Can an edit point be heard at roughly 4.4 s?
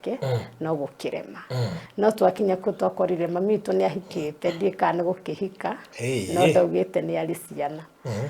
no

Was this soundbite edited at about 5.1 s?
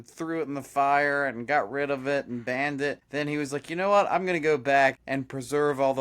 yes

